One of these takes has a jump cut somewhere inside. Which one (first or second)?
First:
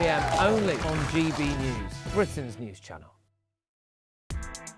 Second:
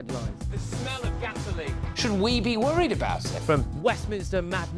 first